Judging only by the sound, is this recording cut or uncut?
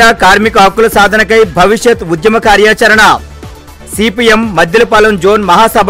uncut